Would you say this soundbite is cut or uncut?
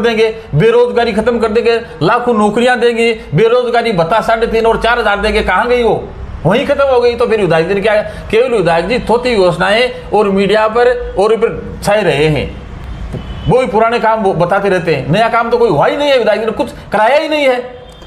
uncut